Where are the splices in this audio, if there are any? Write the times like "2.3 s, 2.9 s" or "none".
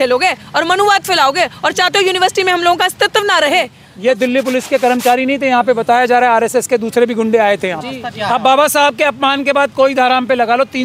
3.8 s, 8.1 s

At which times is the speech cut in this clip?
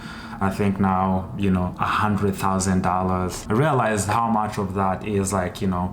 3.4 s

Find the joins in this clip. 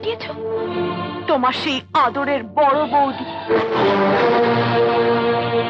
none

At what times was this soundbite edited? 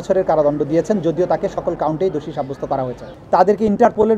3.1 s

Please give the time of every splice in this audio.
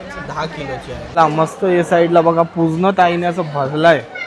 1.0 s

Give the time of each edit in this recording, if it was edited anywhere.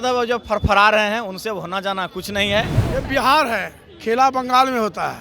2.8 s

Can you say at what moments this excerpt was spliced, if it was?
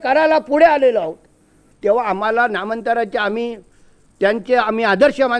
1.7 s

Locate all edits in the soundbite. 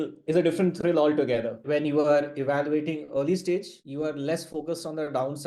1.5 s

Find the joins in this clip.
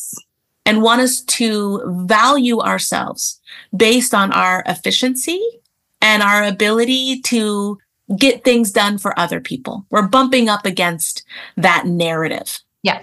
none

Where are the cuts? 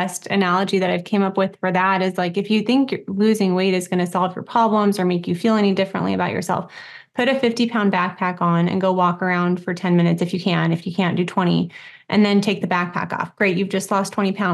none

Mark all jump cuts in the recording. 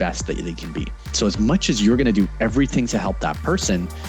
1.2 s

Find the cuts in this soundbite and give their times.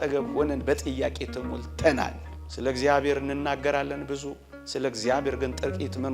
2.3 s

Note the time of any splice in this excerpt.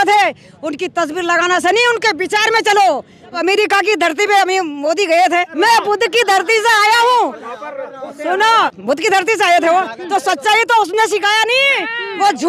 3.4 s, 5.5 s, 8.8 s

